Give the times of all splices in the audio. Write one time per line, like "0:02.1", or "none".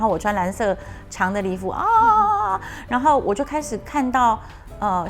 none

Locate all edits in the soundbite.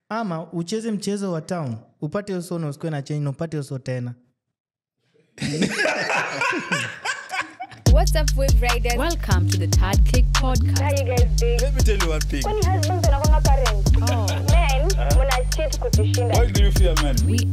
0:07.7

